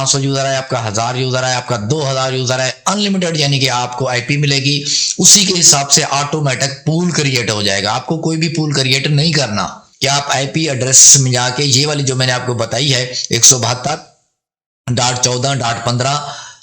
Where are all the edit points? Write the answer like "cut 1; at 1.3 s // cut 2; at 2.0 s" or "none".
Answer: cut 1; at 9.8 s

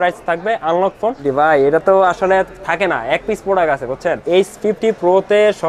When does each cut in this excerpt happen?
cut 1; at 1.3 s // cut 2; at 4.2 s

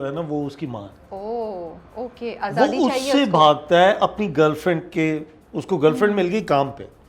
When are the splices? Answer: none

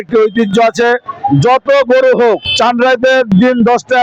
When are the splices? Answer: cut 1; at 2.5 s

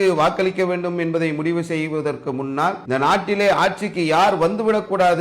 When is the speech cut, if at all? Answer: cut 1; at 2.8 s

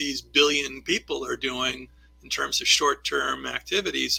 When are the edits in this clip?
none

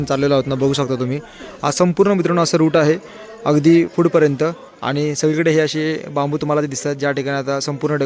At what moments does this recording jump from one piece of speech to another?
none

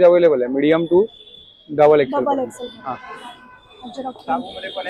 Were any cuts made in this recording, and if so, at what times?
none

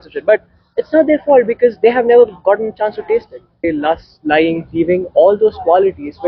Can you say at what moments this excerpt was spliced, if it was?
cut 1; at 3.6 s

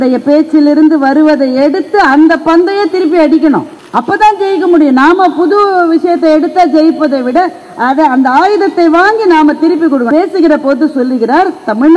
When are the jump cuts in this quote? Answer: cut 1; at 3.8 s // cut 2; at 10.1 s

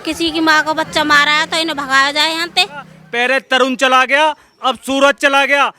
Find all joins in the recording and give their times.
cut 1; at 3.0 s

